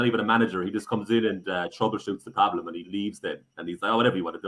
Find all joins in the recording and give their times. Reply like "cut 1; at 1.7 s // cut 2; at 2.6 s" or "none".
none

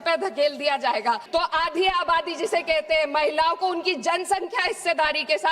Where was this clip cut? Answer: cut 1; at 1.2 s

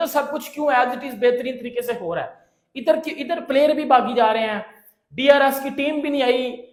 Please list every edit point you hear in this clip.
none

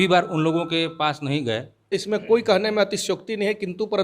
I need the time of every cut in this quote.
cut 1; at 1.9 s

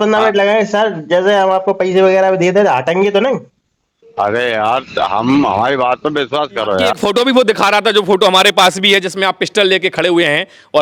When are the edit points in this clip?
cut 1; at 7.0 s

